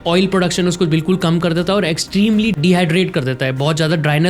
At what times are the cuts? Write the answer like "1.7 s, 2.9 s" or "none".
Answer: 2.6 s